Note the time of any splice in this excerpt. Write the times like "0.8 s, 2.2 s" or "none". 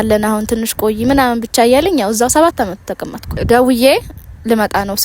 3.3 s

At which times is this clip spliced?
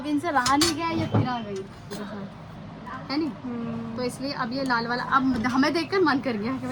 none

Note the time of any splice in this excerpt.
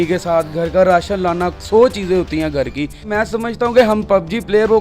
3.1 s

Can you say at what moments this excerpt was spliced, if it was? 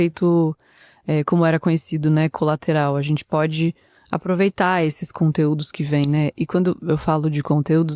none

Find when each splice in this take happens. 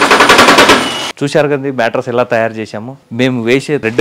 1.1 s

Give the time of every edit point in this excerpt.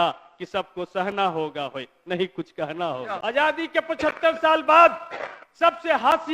3.1 s

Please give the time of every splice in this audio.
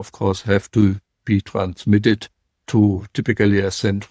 none

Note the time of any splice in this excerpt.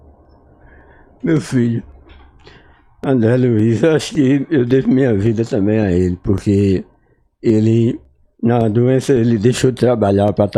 none

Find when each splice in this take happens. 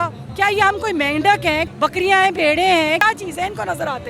3.0 s

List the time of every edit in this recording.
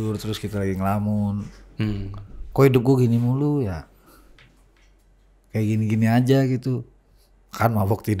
none

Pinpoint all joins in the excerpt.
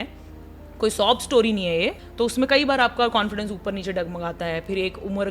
2.0 s

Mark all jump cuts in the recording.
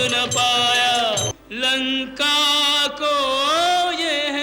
1.3 s

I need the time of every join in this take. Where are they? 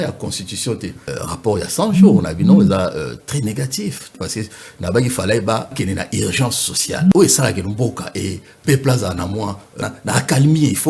1.1 s, 4.1 s, 5.7 s, 7.1 s, 9.8 s

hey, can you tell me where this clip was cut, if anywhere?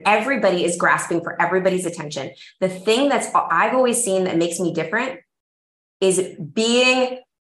none

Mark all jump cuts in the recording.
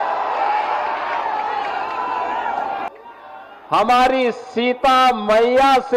2.9 s

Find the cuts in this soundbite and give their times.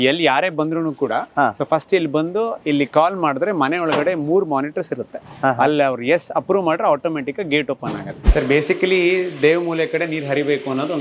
5.2 s, 8.1 s

